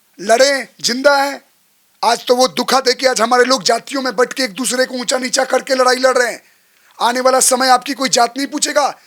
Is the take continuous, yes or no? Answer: yes